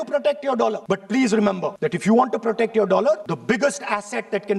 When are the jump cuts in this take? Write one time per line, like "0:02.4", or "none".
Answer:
0:00.8
0:01.8
0:03.3

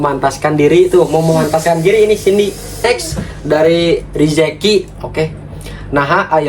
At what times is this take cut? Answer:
0:02.8

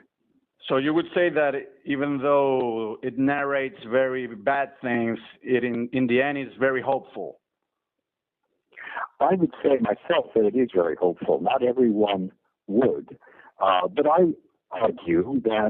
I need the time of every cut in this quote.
0:04.3

